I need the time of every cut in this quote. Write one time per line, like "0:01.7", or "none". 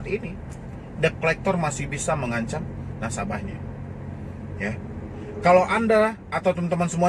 none

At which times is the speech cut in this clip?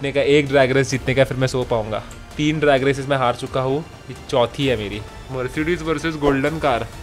0:02.2
0:05.2

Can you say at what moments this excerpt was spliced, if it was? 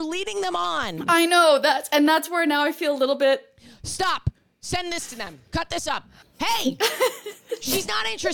0:06.2

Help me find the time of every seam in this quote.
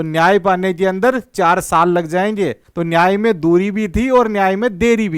0:02.7

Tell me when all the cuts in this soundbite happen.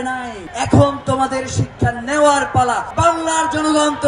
0:02.9

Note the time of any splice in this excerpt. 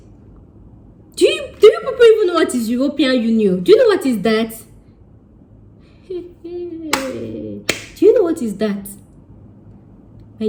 none

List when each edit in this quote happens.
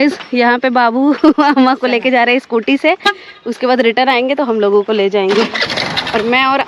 none

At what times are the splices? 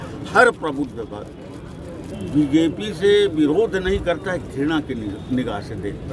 none

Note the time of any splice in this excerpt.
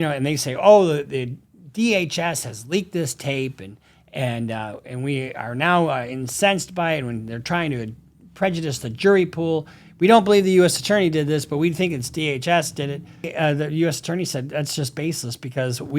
0:13.3

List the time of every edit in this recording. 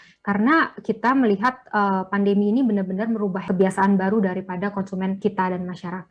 0:03.4
0:05.2

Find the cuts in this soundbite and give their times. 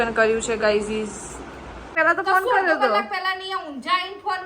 0:01.9

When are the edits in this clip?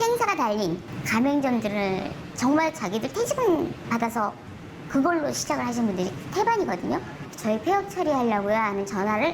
0:00.9
0:02.2
0:03.8
0:07.3

